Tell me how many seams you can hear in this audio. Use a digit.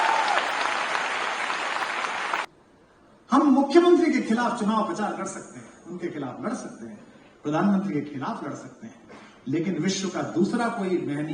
1